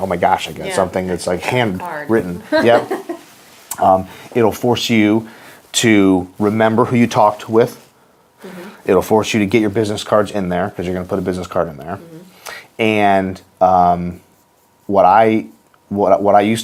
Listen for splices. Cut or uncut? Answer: uncut